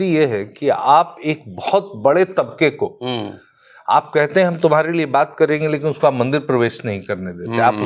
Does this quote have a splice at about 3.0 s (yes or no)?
no